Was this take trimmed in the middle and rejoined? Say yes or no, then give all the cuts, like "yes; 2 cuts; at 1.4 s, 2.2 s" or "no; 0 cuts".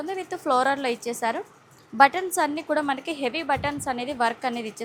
no; 0 cuts